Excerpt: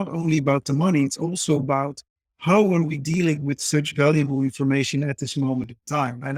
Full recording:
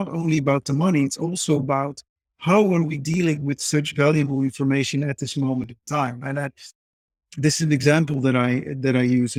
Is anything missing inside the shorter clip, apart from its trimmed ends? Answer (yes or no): no